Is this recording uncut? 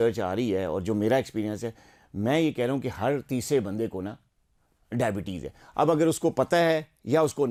yes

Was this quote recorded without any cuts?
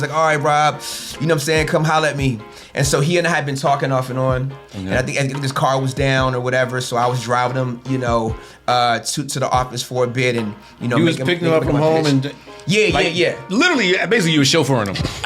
yes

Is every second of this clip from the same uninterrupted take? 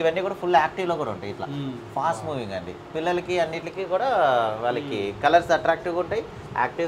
yes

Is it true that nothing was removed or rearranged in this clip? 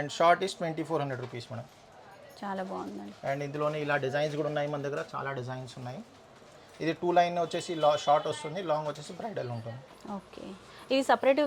yes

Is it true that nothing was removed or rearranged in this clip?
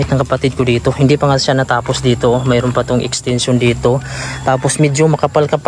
yes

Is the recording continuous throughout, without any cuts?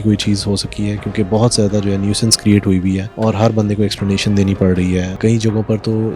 no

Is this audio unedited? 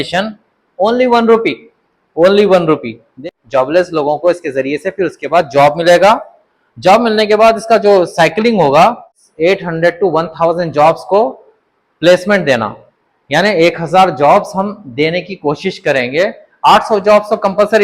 no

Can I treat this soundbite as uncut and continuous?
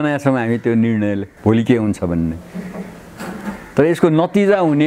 yes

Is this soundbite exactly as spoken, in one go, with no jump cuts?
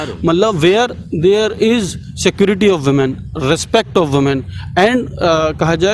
yes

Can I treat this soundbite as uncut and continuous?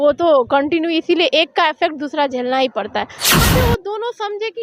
no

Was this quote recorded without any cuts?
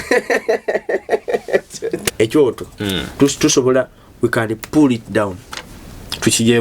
no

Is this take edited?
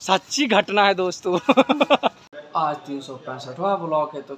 yes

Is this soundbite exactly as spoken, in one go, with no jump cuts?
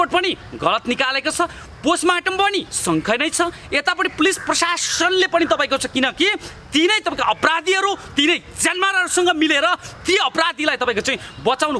yes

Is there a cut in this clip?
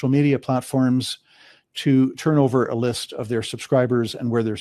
no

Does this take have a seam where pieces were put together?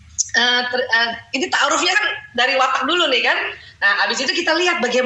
no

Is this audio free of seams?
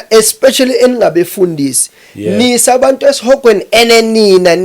yes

